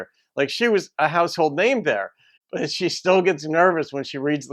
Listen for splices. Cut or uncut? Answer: cut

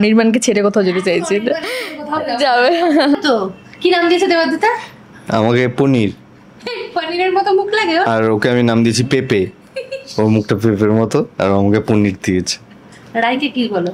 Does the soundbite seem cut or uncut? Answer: cut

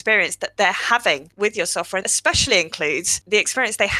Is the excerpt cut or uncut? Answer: cut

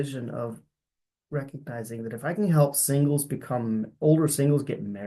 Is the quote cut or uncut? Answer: uncut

